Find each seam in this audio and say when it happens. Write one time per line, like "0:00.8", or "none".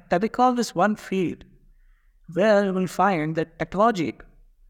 none